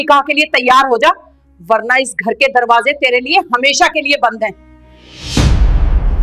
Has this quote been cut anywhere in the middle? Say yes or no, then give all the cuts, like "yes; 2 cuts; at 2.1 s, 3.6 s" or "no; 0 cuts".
no; 0 cuts